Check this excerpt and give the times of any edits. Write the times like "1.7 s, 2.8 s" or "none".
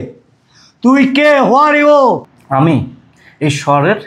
2.3 s